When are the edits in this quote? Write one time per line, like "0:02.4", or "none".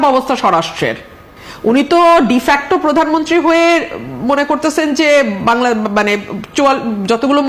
none